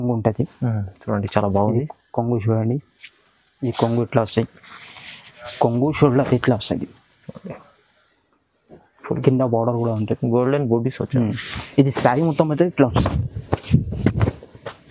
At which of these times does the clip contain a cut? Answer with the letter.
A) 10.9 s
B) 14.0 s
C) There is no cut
C